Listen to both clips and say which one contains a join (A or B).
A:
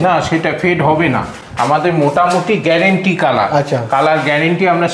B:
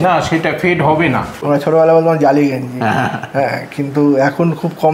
B